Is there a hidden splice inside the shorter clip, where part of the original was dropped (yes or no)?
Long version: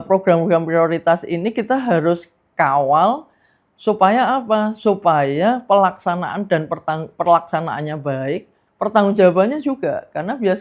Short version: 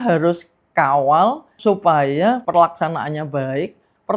yes